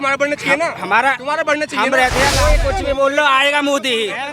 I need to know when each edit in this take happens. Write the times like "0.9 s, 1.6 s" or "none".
2.4 s